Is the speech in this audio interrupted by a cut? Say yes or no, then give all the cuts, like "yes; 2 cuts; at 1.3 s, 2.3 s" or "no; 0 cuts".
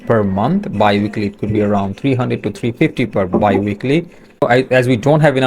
yes; 1 cut; at 4.4 s